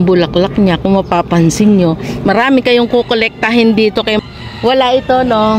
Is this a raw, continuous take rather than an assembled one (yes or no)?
no